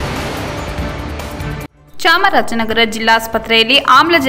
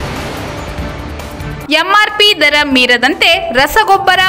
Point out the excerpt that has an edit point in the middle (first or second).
second